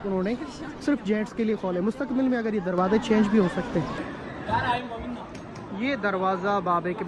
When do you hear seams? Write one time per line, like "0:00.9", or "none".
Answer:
0:04.0